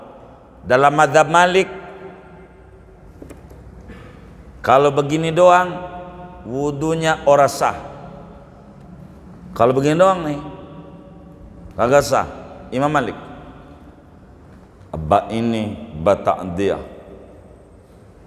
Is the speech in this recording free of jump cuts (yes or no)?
yes